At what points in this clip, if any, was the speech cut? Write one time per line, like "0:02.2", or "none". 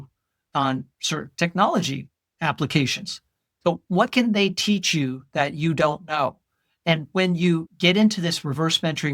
0:07.7